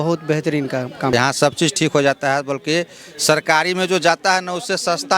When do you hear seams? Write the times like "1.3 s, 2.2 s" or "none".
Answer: 1.1 s